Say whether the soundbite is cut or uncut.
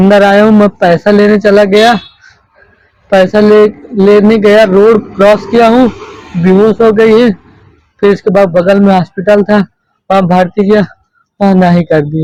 uncut